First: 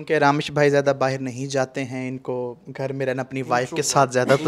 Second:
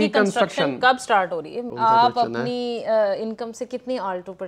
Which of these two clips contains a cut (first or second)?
second